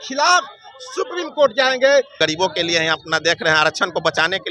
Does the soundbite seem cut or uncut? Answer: cut